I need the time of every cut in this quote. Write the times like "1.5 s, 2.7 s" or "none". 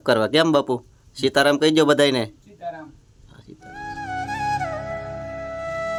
none